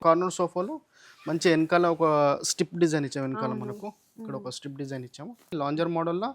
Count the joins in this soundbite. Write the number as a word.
one